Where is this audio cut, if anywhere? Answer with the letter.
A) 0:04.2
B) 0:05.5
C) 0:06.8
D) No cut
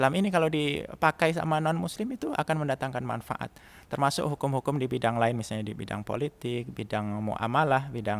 D